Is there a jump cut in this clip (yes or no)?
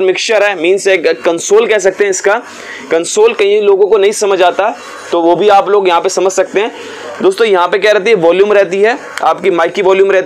no